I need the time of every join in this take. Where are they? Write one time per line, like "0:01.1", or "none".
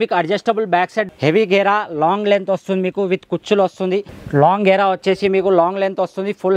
0:01.1
0:04.2